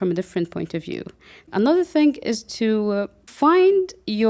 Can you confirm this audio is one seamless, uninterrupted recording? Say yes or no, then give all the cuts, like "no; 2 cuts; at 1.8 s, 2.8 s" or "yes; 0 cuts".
no; 2 cuts; at 1.5 s, 3.3 s